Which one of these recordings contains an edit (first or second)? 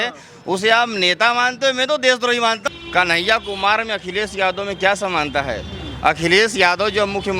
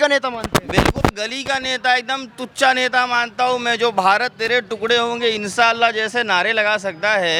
first